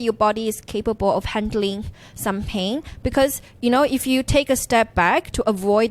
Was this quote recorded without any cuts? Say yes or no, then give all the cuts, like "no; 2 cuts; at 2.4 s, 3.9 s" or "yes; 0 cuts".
yes; 0 cuts